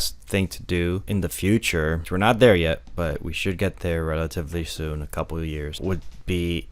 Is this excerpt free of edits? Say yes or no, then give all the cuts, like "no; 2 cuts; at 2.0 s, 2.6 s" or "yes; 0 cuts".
no; 3 cuts; at 1.0 s, 2.0 s, 5.8 s